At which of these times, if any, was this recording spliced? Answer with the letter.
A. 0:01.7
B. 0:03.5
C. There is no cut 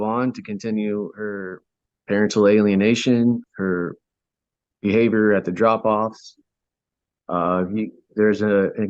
B